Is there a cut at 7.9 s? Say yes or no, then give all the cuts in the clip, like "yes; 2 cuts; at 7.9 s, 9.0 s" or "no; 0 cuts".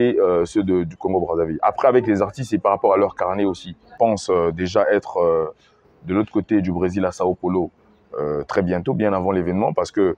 no; 1 cut; at 3.8 s